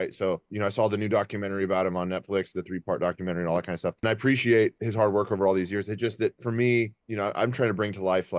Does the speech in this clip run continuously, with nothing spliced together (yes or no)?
no